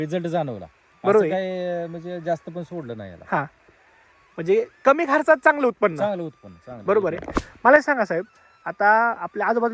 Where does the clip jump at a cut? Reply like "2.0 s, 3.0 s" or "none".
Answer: none